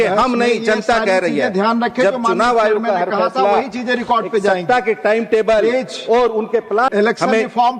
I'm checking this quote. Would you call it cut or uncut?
cut